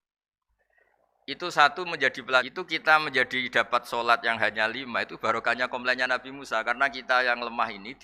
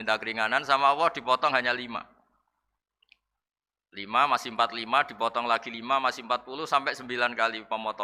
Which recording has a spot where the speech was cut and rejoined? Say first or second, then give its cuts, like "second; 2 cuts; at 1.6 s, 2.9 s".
first; 1 cut; at 2.5 s